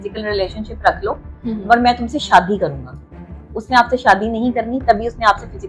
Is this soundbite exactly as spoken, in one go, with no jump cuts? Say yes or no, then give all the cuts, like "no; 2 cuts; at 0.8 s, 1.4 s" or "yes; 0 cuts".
yes; 0 cuts